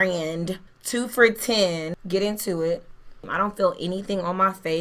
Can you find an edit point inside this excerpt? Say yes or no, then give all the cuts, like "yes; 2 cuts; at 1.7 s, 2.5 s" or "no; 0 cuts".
yes; 1 cut; at 3.3 s